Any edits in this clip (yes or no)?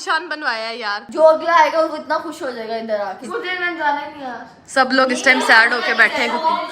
yes